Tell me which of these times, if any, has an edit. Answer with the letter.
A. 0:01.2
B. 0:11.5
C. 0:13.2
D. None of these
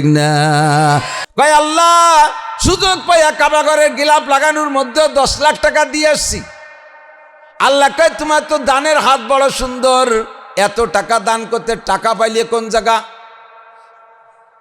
A